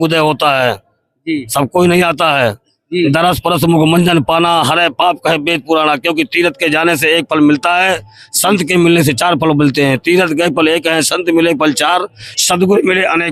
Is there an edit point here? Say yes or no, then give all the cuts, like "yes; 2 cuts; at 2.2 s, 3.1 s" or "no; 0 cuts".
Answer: no; 0 cuts